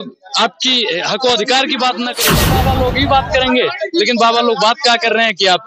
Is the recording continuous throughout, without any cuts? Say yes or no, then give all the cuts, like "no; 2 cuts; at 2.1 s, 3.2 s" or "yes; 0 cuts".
no; 1 cut; at 2.4 s